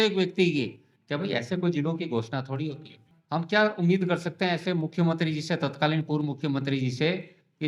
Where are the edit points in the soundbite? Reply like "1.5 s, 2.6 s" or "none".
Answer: 3.1 s